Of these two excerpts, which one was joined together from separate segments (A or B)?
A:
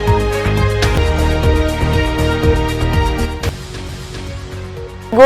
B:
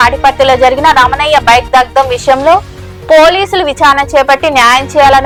A